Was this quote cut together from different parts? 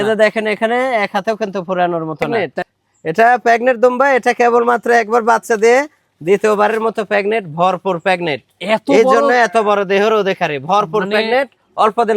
yes; 1 cut; at 2.3 s

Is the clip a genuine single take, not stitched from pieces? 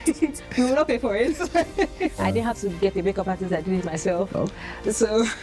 no; 1 cut; at 2.2 s

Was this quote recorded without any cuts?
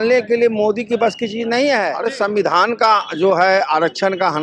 no; 1 cut; at 1.9 s

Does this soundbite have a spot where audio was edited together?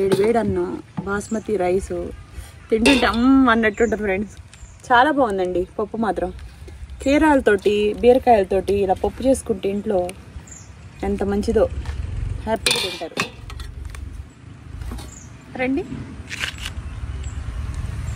no; 0 cuts

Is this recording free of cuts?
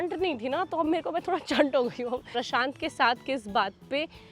no; 1 cut; at 2.3 s

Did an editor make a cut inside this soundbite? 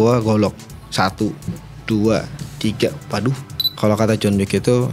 yes; 1 cut; at 3.7 s

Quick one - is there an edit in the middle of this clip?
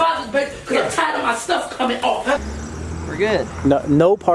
yes; 1 cut; at 2.4 s

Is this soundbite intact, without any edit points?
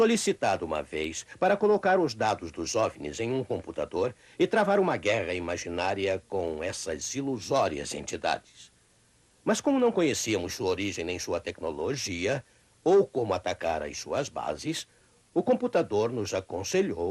no; 1 cut; at 6.2 s

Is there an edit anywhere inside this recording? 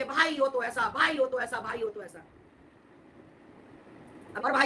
no; 0 cuts

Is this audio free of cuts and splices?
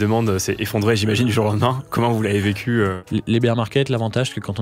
no; 1 cut; at 3.0 s

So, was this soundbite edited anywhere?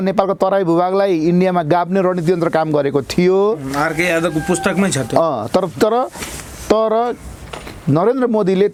no; 0 cuts

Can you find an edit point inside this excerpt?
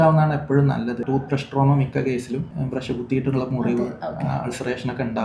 yes; 2 cuts; at 1.0 s, 2.5 s

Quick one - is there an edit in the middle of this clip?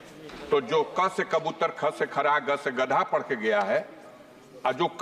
no; 0 cuts

